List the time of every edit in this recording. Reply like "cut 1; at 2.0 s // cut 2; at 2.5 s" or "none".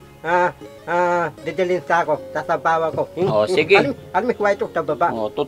cut 1; at 3.1 s